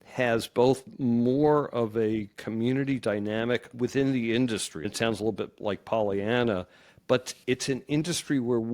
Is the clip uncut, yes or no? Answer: no